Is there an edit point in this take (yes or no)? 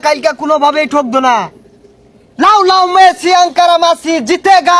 no